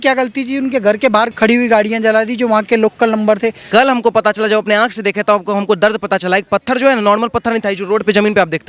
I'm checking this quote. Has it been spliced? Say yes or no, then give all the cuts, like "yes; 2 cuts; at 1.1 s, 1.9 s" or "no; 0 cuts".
yes; 2 cuts; at 1.3 s, 3.6 s